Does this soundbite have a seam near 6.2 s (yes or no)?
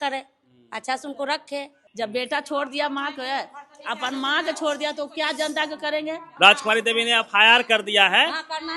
yes